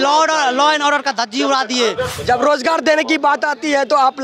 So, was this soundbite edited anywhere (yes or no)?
yes